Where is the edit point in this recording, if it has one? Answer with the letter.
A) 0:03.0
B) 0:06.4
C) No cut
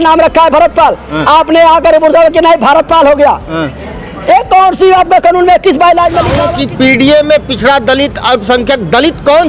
B